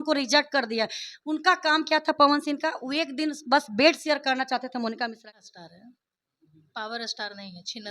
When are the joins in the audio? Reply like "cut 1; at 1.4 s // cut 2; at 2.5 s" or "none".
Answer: cut 1; at 5.2 s